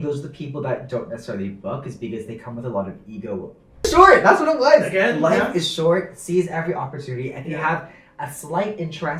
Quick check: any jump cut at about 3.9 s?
yes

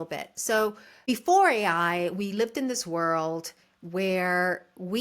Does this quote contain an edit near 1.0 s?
yes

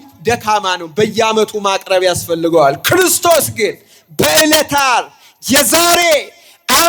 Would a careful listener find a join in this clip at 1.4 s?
no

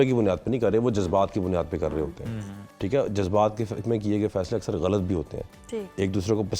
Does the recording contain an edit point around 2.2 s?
no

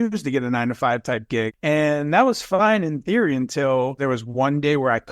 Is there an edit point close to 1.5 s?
yes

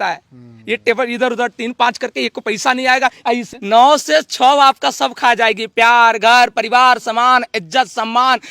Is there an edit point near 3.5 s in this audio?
yes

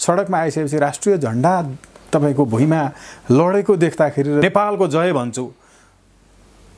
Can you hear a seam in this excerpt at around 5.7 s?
no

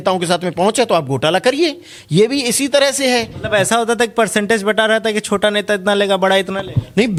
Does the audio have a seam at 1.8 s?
no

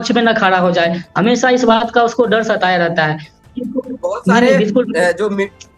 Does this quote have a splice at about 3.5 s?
yes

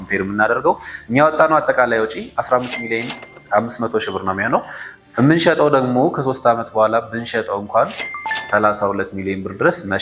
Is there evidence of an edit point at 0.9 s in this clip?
yes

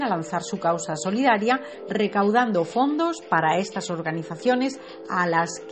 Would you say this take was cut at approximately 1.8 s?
no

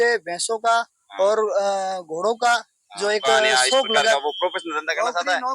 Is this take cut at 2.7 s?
no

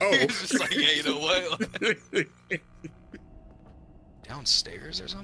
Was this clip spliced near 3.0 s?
yes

